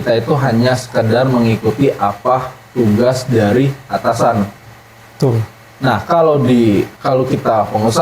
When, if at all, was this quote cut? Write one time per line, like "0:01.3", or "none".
0:07.0